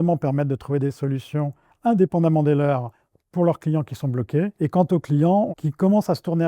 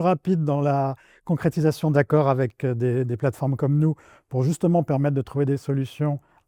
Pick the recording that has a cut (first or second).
first